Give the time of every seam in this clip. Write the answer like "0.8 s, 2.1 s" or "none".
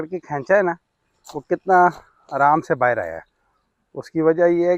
none